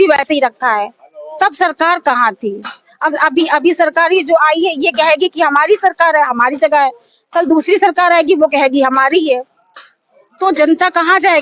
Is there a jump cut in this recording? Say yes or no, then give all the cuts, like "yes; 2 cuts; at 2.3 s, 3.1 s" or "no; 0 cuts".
no; 0 cuts